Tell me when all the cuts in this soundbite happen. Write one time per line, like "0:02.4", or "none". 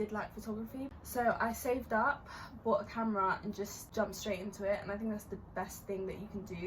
0:00.9
0:03.8